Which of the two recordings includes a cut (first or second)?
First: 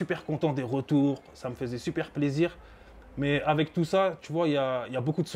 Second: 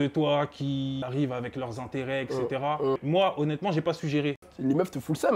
second